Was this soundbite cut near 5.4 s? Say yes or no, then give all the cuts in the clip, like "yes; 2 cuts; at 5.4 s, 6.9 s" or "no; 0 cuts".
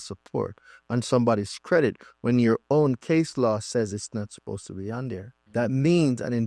yes; 1 cut; at 5.4 s